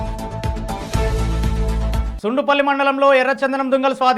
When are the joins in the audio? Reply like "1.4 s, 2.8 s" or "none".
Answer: 2.1 s